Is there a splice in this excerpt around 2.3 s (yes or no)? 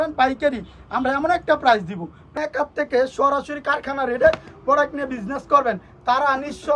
yes